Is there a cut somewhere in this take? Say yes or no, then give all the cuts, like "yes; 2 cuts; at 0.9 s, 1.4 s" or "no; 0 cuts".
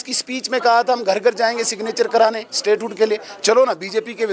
no; 0 cuts